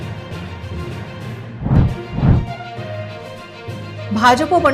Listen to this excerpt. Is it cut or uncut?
cut